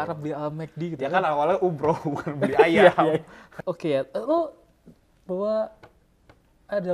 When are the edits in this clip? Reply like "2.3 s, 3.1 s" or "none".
none